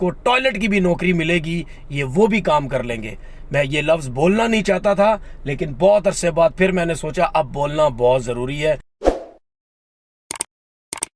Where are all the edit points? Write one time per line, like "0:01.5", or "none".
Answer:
0:08.9